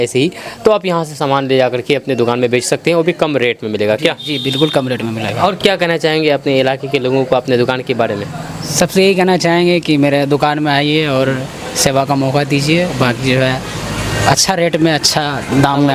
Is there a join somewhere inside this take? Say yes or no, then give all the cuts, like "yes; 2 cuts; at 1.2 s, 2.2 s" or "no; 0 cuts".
no; 0 cuts